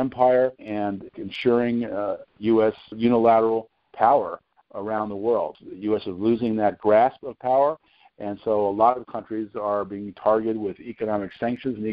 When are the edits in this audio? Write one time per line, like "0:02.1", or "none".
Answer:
0:01.0
0:02.9
0:05.6